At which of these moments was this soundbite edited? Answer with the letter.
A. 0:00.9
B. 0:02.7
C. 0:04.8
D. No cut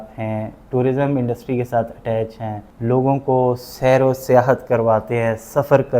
B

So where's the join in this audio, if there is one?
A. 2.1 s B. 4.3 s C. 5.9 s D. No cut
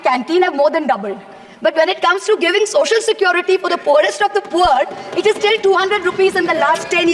D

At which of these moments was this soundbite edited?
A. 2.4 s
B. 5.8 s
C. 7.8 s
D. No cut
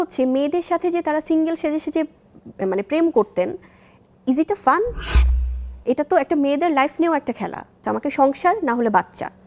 C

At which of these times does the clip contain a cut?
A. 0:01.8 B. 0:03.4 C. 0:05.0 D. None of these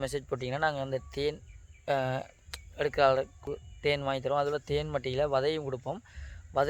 B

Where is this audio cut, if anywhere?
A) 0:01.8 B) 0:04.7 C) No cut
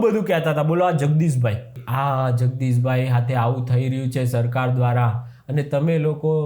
A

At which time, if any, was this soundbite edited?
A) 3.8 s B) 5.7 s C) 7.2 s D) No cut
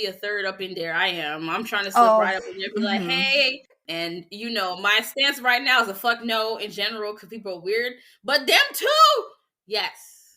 A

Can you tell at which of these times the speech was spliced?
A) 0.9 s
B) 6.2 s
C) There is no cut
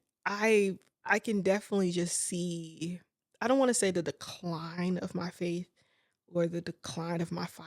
A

